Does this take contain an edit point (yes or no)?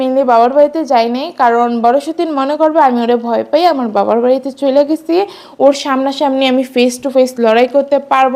no